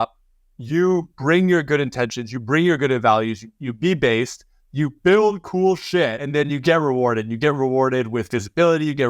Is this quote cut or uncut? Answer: cut